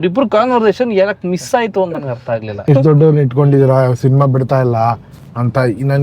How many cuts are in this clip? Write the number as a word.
one